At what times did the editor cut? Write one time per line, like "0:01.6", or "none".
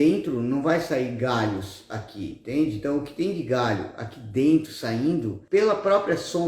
0:05.3